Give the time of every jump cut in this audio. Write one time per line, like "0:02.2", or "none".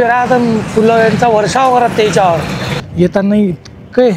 0:02.8